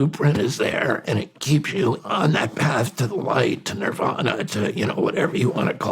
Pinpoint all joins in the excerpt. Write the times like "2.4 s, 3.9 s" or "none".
2.0 s